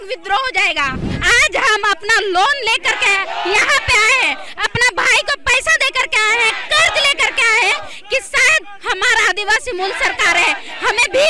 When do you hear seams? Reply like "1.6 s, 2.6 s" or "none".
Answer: 1.1 s